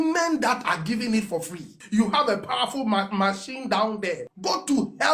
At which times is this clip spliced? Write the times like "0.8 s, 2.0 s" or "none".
1.7 s, 4.3 s